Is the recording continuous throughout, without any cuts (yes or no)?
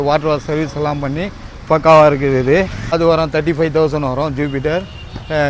no